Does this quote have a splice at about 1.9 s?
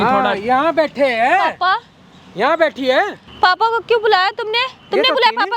no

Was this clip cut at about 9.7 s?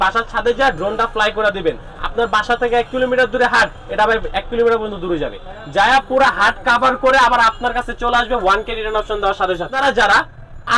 yes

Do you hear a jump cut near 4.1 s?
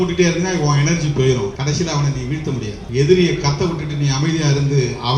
no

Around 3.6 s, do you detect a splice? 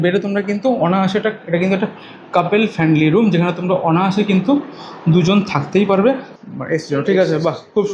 no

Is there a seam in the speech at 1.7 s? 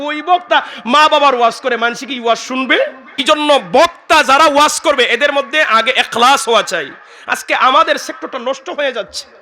no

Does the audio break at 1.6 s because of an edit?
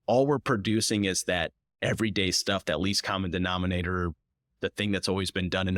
yes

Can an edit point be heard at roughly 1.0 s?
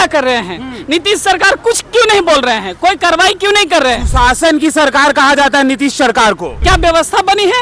no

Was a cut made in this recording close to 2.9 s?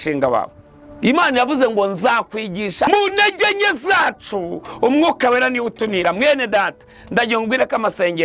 yes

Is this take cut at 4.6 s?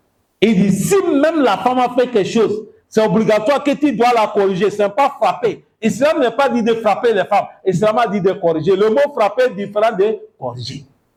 no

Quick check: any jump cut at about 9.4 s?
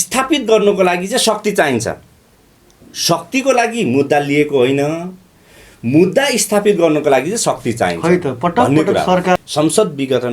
yes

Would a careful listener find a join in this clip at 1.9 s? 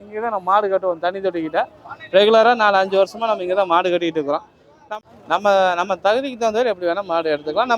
no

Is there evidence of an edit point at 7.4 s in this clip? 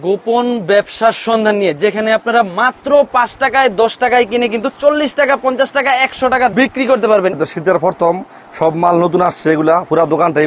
yes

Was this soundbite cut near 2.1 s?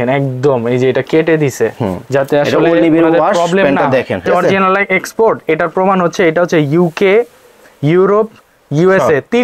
no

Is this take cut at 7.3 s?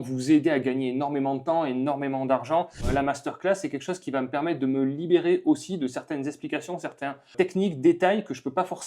yes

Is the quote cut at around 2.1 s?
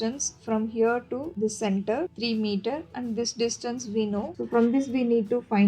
yes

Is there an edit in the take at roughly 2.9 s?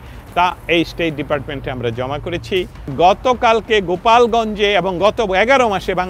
yes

